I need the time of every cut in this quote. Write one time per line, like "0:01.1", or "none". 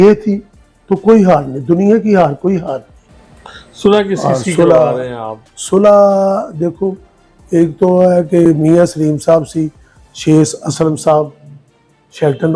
none